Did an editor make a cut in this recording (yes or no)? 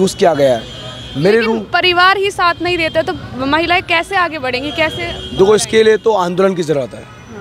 no